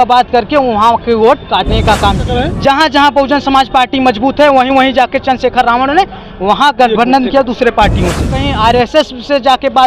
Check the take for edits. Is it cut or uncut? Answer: cut